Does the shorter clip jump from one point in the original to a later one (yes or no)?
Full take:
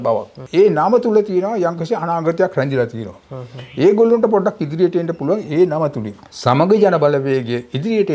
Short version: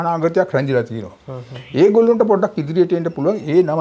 no